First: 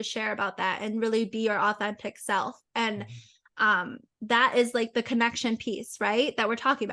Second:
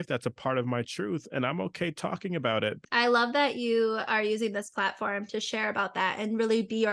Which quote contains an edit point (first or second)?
second